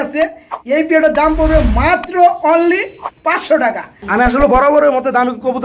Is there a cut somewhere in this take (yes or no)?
yes